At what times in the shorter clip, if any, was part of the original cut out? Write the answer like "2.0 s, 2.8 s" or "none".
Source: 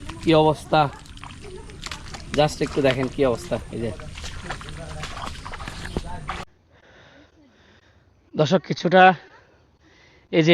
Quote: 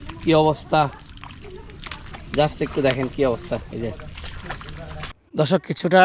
5.1 s